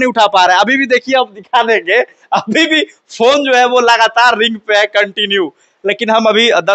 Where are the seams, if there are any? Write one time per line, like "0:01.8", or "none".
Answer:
none